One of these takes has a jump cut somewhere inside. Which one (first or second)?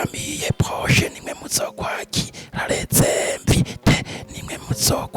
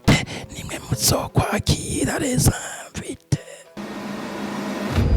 second